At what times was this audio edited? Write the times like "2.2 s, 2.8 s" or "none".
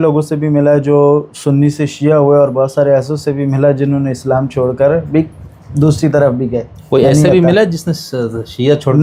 none